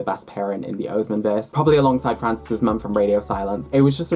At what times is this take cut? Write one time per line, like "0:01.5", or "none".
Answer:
none